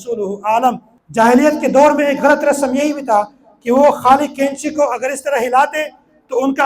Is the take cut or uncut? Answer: cut